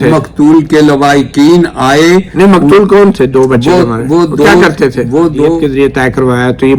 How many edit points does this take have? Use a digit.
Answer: 1